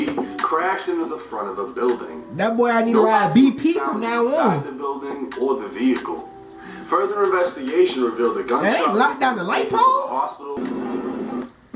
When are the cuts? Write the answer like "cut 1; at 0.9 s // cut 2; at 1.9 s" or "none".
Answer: cut 1; at 10.6 s